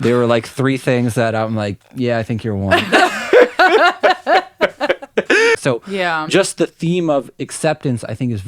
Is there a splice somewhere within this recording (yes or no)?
yes